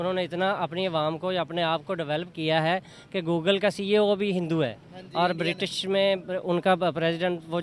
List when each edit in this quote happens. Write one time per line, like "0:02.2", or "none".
none